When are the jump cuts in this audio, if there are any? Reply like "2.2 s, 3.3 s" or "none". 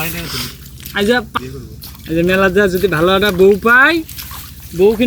1.3 s